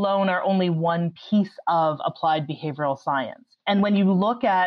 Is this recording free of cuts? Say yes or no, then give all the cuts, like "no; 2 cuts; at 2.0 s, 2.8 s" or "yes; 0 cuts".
yes; 0 cuts